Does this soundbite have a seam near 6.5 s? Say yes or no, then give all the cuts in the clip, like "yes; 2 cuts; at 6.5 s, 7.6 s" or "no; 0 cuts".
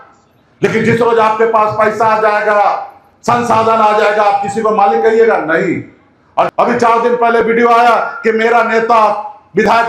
yes; 1 cut; at 6.5 s